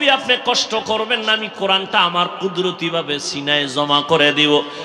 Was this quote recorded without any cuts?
yes; 0 cuts

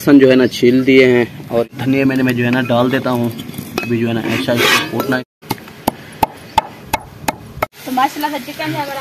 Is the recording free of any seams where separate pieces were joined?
no; 3 cuts; at 1.7 s, 5.2 s, 7.8 s

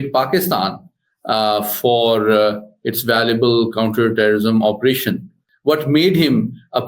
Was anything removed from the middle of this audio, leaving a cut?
yes; 1 cut; at 5.5 s

